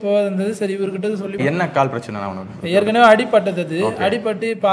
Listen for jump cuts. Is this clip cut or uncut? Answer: cut